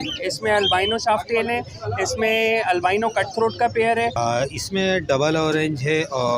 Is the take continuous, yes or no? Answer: no